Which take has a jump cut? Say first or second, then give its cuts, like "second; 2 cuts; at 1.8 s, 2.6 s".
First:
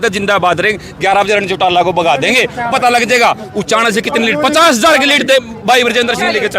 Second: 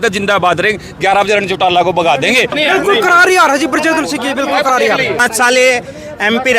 second; 2 cuts; at 2.5 s, 5.2 s